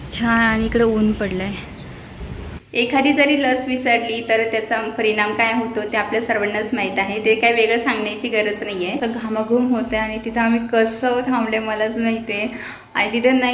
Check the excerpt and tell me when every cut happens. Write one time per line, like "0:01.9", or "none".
0:02.4
0:09.0